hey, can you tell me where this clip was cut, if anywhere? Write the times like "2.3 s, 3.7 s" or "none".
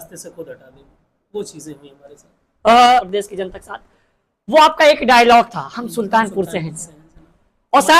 3.1 s